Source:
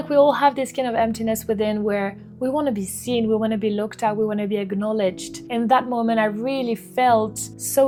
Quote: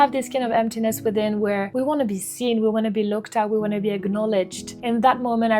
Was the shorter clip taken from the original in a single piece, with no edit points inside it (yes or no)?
no